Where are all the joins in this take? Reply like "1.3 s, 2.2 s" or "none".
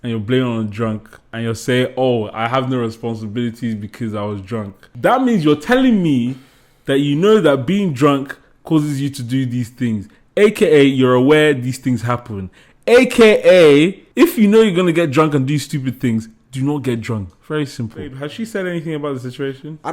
1.3 s, 4.8 s, 14.0 s, 18.3 s